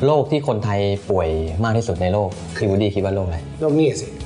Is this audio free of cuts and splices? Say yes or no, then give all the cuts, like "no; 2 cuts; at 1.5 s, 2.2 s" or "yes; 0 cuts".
yes; 0 cuts